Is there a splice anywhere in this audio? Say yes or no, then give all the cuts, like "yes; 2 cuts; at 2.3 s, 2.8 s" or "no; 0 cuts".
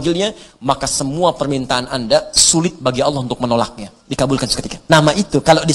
yes; 1 cut; at 4.7 s